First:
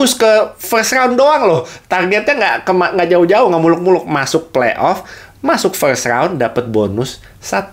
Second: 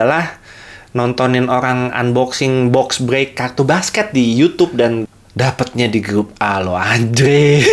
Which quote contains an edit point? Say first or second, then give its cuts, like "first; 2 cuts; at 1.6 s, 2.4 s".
second; 1 cut; at 5.0 s